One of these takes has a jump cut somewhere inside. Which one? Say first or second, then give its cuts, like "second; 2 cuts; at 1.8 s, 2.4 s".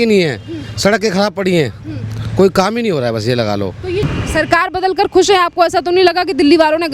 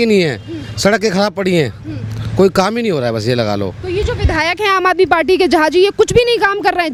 first; 1 cut; at 4.0 s